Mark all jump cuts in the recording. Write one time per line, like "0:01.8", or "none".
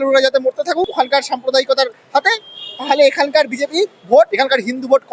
0:00.9
0:04.3

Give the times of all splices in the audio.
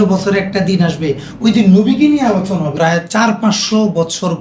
0:02.7

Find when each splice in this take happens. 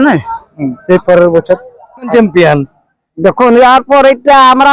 0:02.1

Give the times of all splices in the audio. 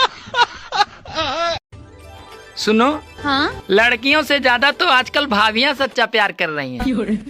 0:01.7

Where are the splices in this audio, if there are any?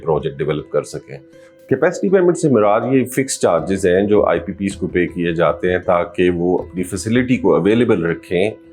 0:01.4

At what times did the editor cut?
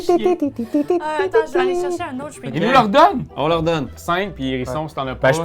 0:03.9

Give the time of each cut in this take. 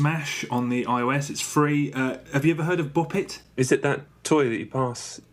none

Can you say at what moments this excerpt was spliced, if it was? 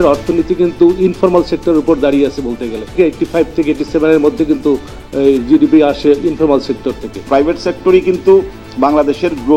0:02.9
0:07.2

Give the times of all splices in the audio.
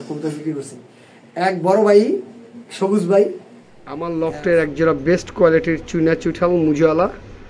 0:03.9

